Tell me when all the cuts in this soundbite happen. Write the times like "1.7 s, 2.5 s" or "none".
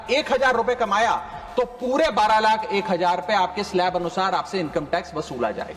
none